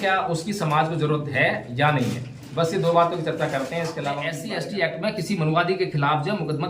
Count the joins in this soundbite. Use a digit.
1